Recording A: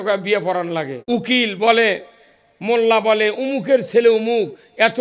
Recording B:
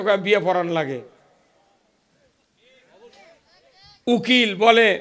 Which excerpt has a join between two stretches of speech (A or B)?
A